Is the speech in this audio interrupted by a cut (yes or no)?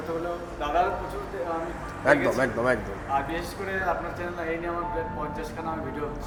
no